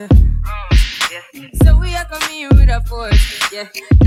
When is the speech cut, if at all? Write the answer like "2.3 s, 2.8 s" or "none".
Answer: none